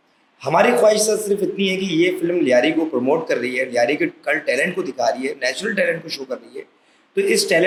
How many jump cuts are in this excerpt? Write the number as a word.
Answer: zero